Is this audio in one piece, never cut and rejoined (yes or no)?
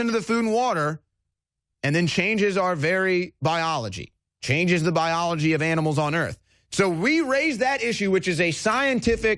yes